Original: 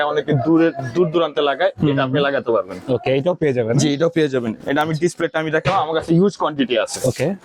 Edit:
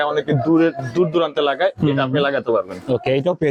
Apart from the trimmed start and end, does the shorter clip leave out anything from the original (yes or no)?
no